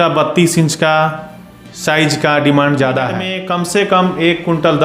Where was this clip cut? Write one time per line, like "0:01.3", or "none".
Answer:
0:03.4